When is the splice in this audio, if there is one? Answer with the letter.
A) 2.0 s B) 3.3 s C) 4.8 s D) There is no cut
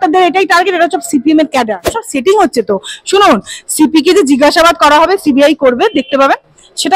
A